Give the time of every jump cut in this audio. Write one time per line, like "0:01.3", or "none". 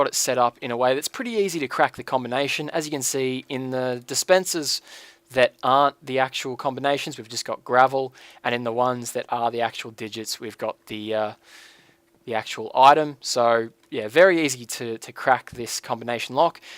0:07.2